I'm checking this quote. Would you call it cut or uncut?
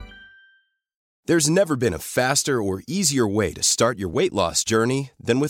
cut